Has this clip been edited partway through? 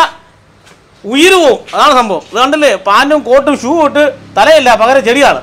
no; 0 cuts

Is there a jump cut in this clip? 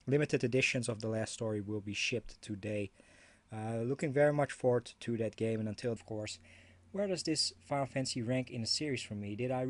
no; 0 cuts

